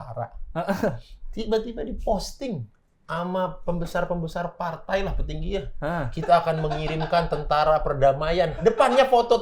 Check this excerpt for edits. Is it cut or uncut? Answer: uncut